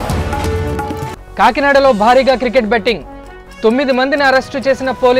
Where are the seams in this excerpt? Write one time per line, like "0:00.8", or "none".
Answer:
0:01.0